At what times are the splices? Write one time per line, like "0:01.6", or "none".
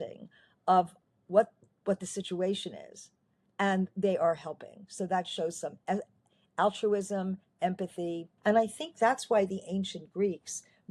0:08.3